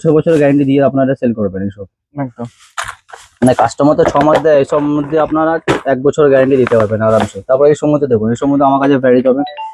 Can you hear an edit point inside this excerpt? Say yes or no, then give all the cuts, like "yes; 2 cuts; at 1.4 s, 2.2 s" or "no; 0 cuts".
no; 0 cuts